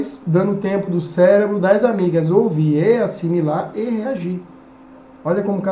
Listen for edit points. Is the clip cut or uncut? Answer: uncut